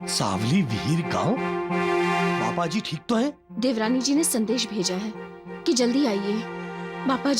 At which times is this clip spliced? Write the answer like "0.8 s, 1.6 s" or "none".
none